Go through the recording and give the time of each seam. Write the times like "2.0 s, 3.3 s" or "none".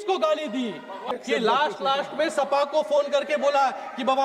1.0 s

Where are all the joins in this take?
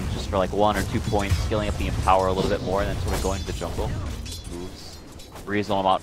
2.3 s

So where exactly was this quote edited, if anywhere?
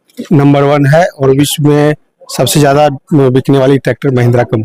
none

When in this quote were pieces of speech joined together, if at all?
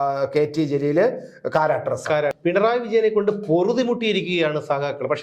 2.4 s

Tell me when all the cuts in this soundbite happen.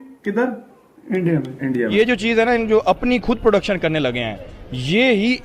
1.9 s

